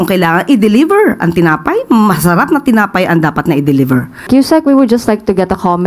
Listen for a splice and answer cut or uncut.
cut